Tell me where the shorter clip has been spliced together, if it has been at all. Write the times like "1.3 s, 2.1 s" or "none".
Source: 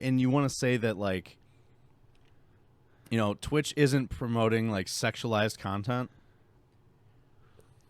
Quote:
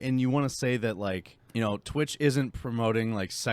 1.3 s